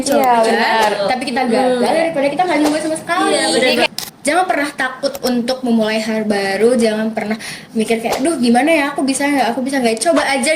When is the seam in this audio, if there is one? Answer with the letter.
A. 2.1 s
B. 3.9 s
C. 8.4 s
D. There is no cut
B